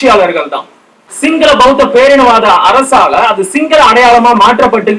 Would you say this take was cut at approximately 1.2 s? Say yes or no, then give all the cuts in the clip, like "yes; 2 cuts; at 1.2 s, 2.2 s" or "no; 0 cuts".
yes; 1 cut; at 1.2 s